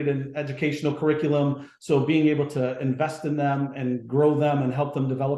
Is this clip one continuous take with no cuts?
yes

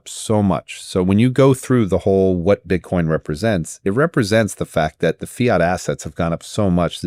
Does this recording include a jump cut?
no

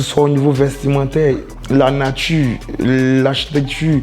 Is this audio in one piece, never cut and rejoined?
no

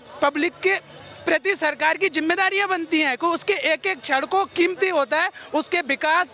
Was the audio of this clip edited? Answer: no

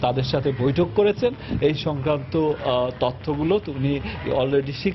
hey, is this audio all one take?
yes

